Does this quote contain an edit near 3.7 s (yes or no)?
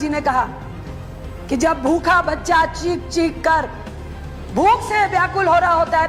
no